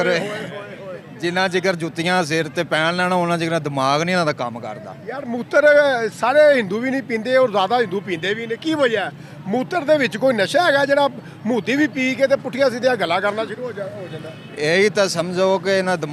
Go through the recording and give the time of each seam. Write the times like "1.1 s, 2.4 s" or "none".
none